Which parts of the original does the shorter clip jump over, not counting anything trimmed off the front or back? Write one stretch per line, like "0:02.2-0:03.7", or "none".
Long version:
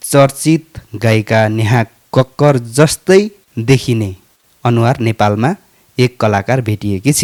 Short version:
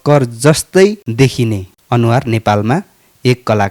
0:03.6-0:04.0